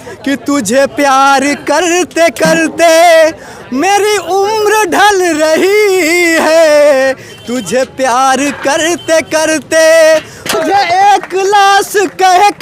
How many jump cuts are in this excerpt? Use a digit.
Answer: 1